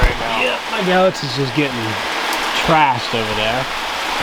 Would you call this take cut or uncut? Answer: uncut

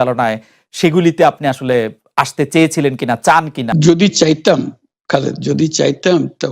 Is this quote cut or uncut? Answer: cut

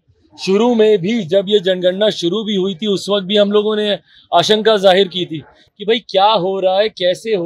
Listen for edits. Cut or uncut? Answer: uncut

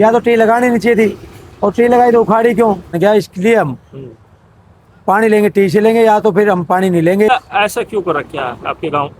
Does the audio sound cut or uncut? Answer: cut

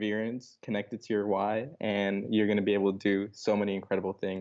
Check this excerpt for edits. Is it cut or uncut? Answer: uncut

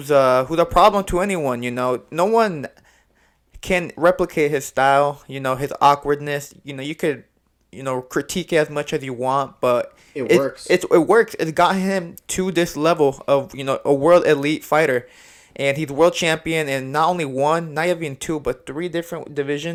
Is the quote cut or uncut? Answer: uncut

